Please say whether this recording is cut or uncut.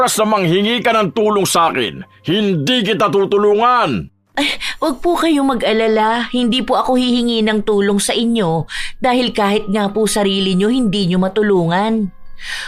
cut